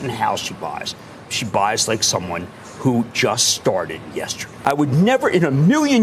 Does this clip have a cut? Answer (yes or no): yes